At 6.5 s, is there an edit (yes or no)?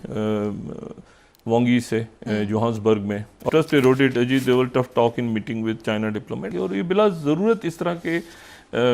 yes